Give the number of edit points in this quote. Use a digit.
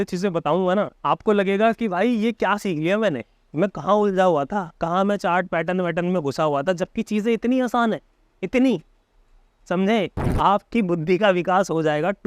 2